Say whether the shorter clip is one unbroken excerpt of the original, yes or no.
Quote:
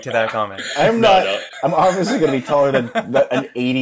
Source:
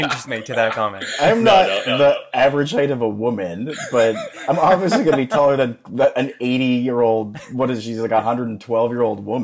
no